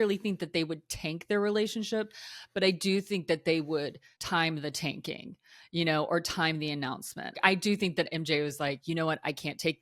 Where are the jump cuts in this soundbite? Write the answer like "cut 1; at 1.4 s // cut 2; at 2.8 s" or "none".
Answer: cut 1; at 4.3 s // cut 2; at 7.4 s // cut 3; at 8.8 s